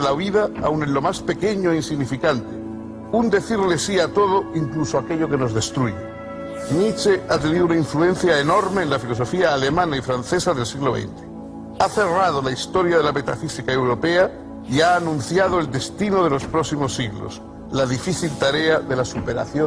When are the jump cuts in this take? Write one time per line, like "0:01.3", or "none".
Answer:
0:07.2

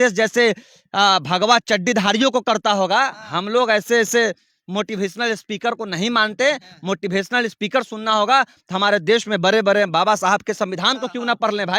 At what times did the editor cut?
none

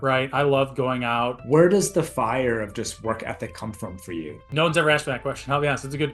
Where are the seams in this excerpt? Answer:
0:01.4
0:04.5

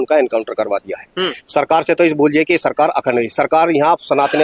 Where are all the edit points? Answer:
none

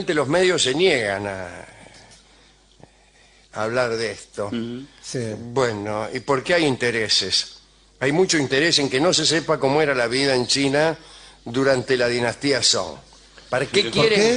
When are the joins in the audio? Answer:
0:04.3

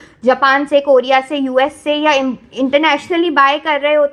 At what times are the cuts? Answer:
none

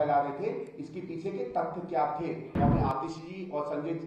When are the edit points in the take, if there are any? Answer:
0:02.6

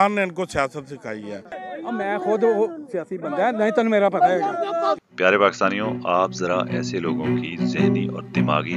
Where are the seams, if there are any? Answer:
0:01.6
0:05.0

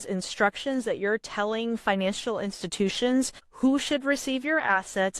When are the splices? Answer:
0:03.4

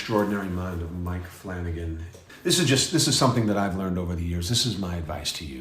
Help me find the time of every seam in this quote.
0:02.1

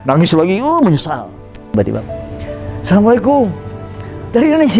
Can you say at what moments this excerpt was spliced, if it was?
0:01.7

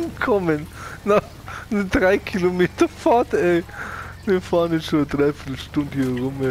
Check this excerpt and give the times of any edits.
none

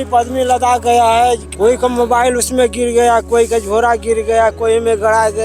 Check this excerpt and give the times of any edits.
0:01.5

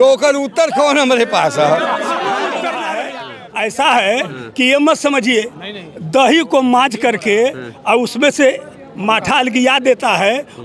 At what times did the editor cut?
0:03.2

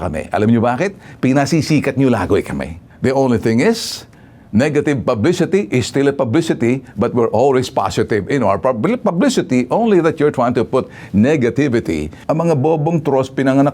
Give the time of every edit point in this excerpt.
0:12.1

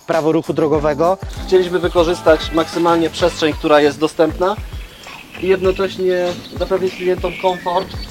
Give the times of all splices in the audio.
0:01.3

